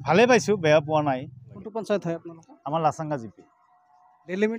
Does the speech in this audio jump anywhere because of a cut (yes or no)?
no